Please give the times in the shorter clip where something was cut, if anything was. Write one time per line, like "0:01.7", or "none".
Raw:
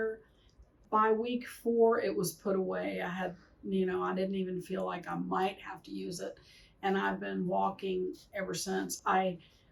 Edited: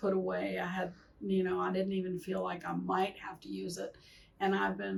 none